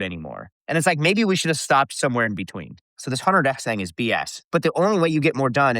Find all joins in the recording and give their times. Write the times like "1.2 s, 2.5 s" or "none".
2.9 s, 4.4 s

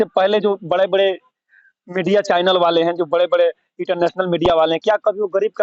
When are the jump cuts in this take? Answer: none

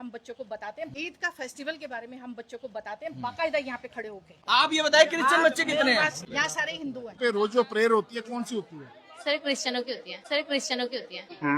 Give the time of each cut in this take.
0.9 s, 3.1 s, 4.4 s, 7.1 s

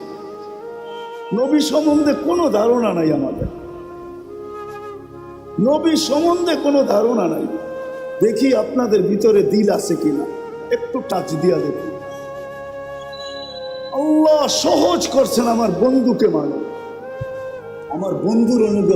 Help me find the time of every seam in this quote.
16.7 s, 17.9 s

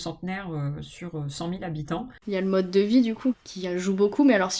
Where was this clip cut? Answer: 2.1 s, 3.4 s

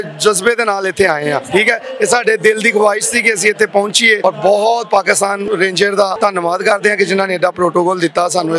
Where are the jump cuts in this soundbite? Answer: 1.4 s, 4.2 s, 5.4 s, 6.1 s

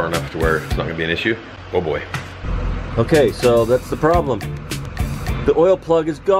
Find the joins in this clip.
1.5 s, 2.5 s

